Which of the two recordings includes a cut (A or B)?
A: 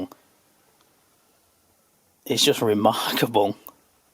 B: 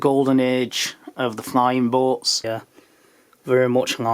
B